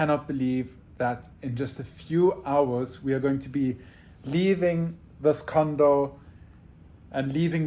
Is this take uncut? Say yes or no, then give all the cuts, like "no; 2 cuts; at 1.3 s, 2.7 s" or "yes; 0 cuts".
yes; 0 cuts